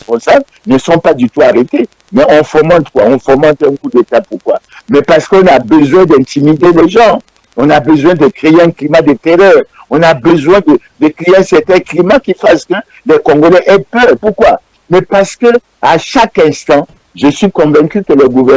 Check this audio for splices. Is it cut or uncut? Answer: cut